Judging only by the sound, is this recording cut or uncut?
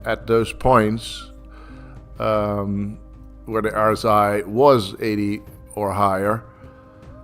uncut